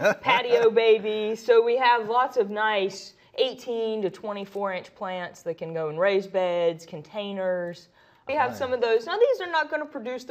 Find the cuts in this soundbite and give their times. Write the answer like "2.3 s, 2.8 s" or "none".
none